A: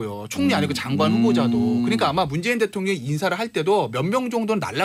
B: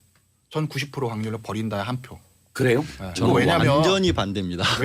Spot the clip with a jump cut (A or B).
B